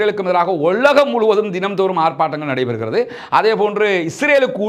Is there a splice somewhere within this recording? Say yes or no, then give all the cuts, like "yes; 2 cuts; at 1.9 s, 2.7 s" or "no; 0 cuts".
no; 0 cuts